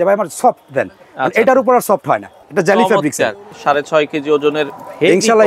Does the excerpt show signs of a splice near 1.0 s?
no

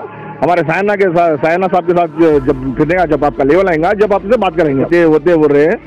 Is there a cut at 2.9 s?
no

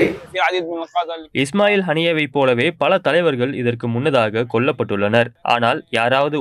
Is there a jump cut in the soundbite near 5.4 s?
yes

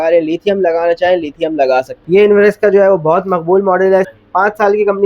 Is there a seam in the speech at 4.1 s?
yes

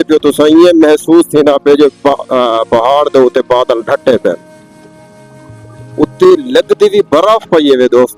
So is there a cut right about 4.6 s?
no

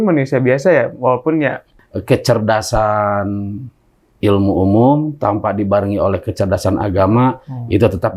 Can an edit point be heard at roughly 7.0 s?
no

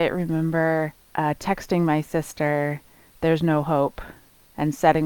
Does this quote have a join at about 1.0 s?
yes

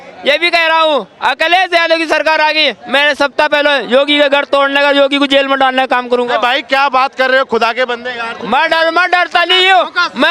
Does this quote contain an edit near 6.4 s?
no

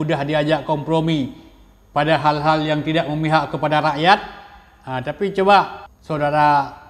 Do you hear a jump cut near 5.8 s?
yes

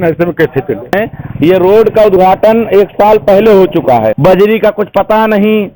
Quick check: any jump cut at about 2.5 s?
no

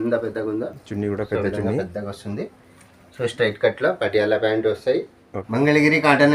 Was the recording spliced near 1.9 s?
no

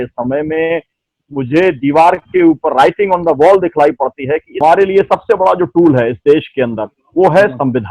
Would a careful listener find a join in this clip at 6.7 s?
no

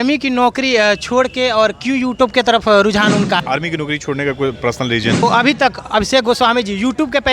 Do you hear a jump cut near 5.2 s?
yes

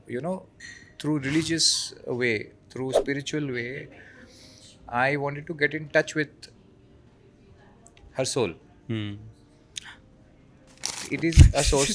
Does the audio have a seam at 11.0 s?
yes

